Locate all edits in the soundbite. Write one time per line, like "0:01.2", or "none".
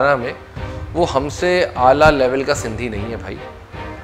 none